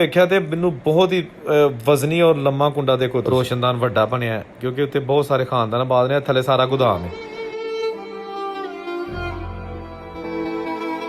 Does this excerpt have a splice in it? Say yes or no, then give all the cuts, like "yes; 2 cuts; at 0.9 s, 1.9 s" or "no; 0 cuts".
yes; 1 cut; at 3.2 s